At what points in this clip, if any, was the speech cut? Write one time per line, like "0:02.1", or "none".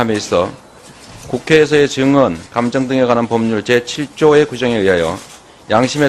0:02.8